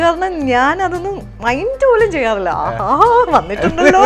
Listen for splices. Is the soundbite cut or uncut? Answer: uncut